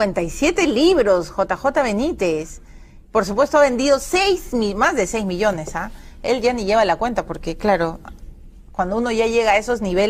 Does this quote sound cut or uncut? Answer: uncut